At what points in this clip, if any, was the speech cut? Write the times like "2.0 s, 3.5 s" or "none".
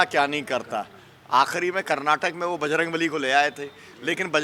none

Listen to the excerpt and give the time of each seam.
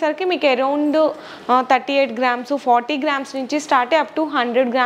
none

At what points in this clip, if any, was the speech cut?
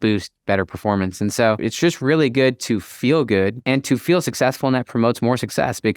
1.6 s

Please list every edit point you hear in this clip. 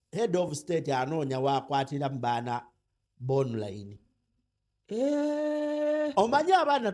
none

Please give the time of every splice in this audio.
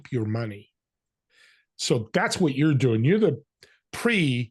none

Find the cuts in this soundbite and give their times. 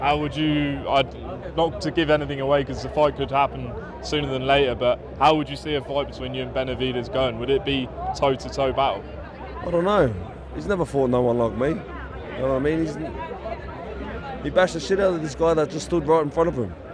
none

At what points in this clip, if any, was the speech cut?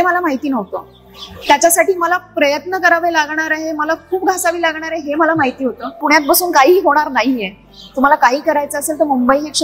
5.9 s

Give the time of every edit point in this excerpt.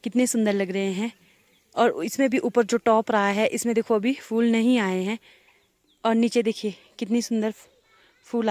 none

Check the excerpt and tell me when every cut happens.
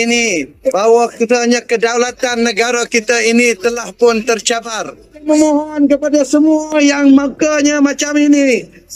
5.2 s

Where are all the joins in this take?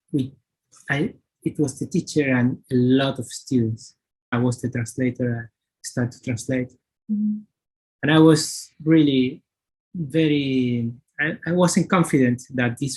4.3 s

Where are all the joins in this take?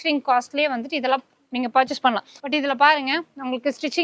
2.3 s

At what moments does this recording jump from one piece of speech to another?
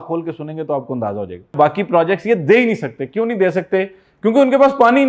1.5 s

